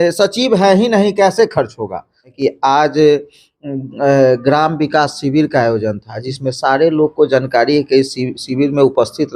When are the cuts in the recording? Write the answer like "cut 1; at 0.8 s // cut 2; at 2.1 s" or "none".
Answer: cut 1; at 2.3 s